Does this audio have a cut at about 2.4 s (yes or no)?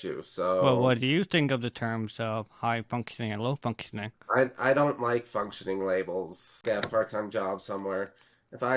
no